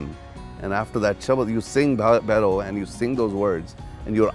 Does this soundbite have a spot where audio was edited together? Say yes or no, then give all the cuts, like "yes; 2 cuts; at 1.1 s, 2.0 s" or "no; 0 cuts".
no; 0 cuts